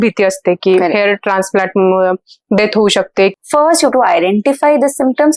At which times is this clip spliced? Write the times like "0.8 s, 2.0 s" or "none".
3.3 s